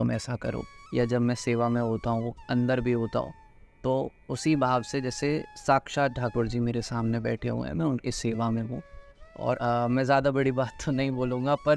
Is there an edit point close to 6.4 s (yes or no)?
no